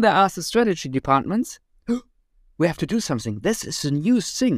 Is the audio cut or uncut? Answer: uncut